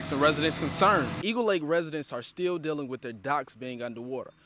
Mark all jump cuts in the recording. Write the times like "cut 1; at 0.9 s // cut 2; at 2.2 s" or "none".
none